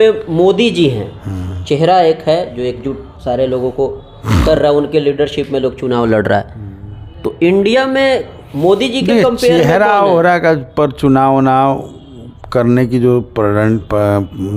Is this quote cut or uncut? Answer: uncut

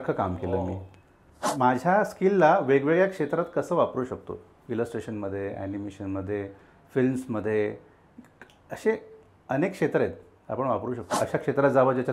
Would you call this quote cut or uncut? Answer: cut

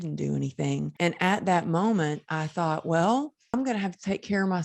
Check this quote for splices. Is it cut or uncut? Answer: cut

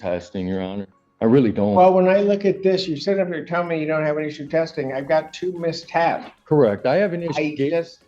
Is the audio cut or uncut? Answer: uncut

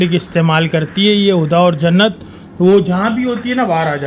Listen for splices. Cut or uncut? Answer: uncut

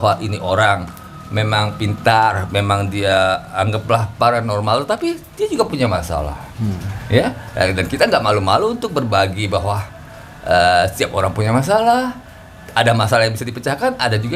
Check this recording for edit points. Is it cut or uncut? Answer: uncut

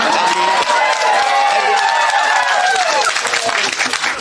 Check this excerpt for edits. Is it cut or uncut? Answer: uncut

